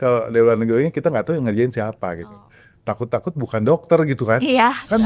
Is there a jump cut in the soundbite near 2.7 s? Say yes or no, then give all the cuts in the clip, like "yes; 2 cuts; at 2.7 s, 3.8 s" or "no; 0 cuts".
no; 0 cuts